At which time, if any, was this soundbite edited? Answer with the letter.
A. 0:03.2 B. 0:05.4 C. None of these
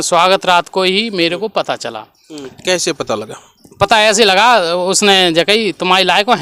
C